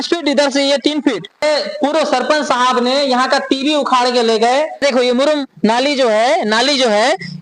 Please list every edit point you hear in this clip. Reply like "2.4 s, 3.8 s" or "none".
1.4 s, 4.8 s